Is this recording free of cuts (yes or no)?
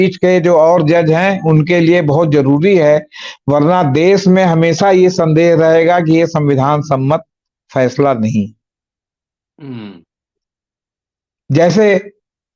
yes